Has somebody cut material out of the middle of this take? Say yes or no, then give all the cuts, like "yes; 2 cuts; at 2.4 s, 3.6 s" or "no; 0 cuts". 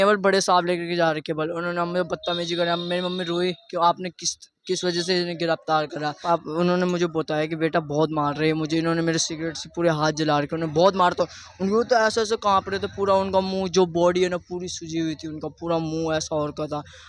yes; 1 cut; at 6.2 s